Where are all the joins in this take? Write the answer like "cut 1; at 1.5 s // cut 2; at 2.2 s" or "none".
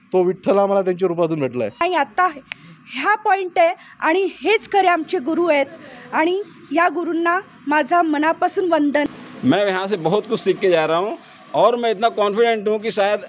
cut 1; at 1.8 s // cut 2; at 9.1 s